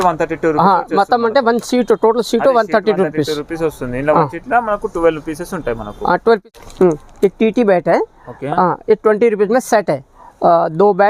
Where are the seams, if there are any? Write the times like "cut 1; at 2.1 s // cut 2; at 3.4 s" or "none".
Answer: cut 1; at 6.4 s